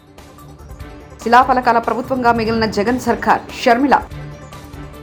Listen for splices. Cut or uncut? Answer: uncut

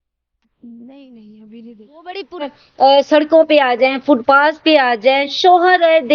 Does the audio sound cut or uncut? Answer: cut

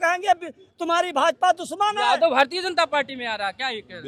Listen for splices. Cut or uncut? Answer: uncut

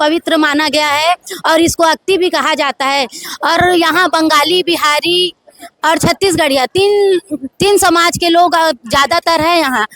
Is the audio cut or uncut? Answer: uncut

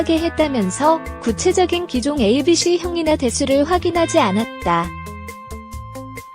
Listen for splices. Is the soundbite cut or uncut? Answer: cut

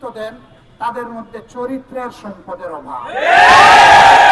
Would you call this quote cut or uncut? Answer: uncut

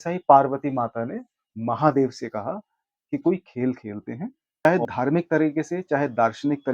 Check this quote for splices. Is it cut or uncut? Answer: cut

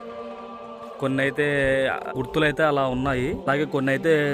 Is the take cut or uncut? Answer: cut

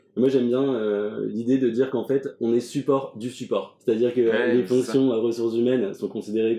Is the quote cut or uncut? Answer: uncut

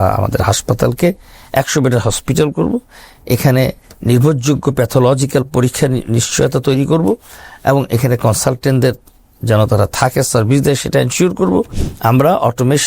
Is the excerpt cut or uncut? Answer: cut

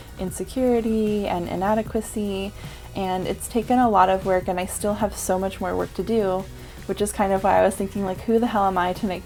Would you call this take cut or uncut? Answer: uncut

